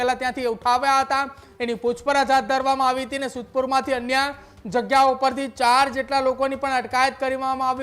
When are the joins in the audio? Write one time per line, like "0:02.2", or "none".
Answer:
none